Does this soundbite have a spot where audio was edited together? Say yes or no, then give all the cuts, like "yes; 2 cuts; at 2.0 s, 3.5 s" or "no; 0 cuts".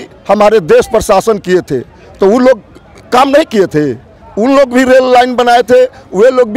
no; 0 cuts